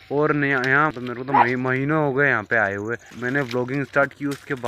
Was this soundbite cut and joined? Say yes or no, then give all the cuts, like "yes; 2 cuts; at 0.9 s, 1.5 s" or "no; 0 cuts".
yes; 2 cuts; at 0.9 s, 3.1 s